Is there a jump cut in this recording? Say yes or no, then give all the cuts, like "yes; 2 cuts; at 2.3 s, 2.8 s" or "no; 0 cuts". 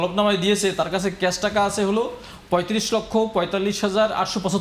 no; 0 cuts